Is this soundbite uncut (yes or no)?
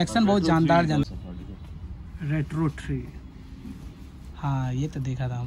no